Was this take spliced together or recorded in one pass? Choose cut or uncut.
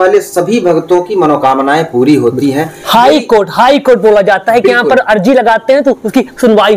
uncut